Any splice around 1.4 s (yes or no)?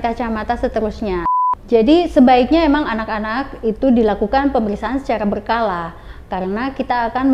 yes